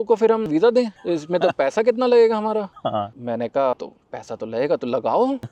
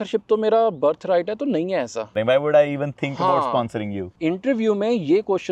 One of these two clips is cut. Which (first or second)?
second